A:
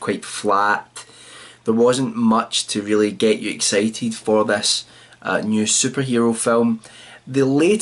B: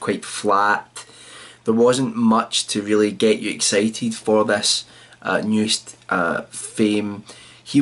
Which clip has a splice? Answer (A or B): A